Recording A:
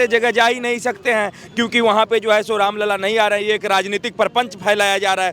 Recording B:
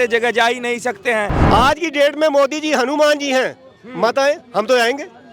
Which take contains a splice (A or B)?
B